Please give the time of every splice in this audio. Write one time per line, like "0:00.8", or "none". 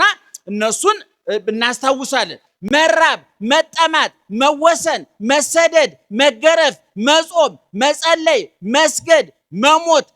0:02.5